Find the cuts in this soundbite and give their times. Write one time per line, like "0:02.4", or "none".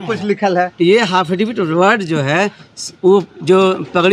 none